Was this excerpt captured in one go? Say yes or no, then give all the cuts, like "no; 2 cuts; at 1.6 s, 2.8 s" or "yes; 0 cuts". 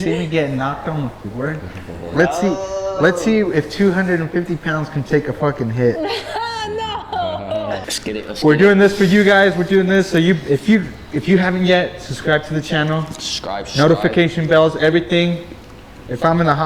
no; 1 cut; at 7.8 s